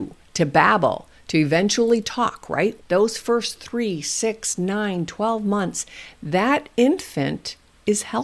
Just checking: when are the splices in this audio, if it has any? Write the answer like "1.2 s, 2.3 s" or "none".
2.8 s

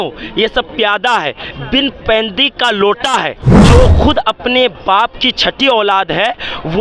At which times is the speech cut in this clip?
3.6 s

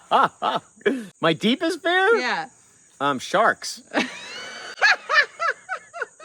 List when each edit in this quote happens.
none

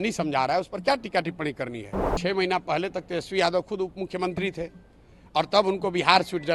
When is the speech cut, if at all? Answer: 2.1 s

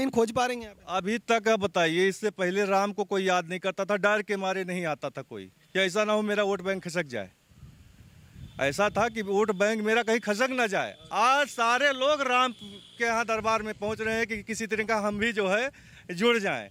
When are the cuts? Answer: none

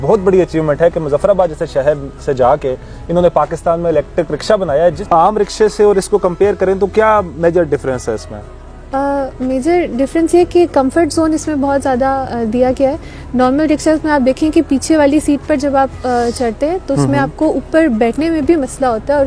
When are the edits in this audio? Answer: none

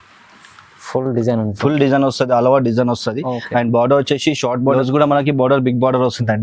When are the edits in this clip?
4.7 s

